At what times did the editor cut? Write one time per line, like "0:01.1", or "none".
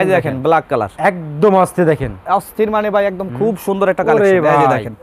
none